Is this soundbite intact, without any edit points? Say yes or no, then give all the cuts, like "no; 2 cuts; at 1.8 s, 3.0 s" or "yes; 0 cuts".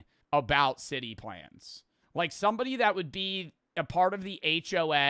yes; 0 cuts